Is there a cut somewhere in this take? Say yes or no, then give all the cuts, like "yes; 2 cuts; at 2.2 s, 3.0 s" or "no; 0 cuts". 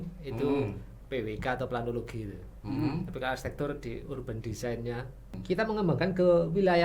yes; 1 cut; at 5.3 s